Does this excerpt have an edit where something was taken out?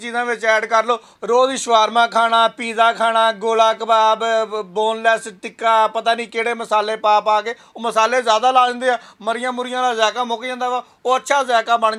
no; 0 cuts

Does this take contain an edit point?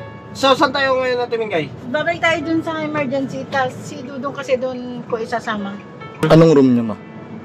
yes; 1 cut; at 6.2 s

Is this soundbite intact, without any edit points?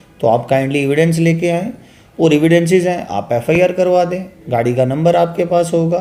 yes; 0 cuts

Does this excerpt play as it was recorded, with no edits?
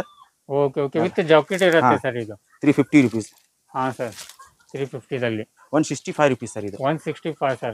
yes; 0 cuts

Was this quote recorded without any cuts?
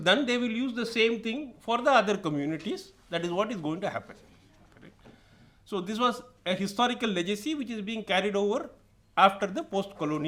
yes; 0 cuts

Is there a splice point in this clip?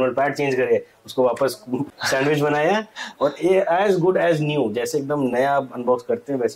no; 0 cuts

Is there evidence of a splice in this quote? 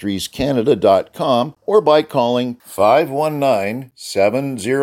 yes; 1 cut; at 1.6 s

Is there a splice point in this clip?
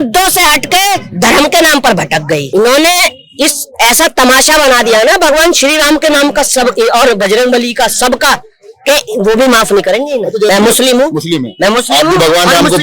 yes; 2 cuts; at 2.5 s, 10.5 s

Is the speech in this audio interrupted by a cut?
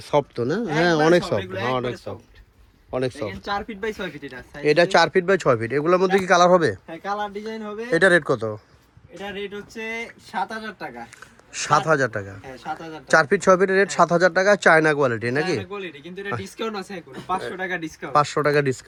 no; 0 cuts

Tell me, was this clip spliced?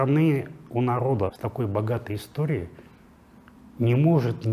yes; 1 cut; at 1.4 s

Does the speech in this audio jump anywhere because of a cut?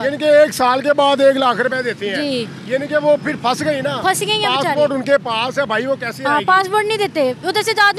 no; 0 cuts

